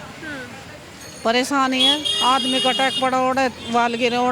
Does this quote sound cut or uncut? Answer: uncut